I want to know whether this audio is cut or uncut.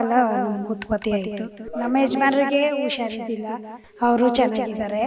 cut